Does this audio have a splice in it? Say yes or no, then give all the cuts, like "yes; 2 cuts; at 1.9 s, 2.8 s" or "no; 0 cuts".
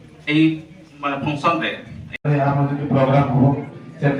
yes; 1 cut; at 2.2 s